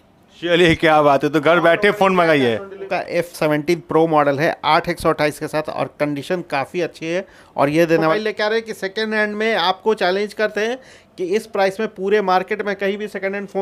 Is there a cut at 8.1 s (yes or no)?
yes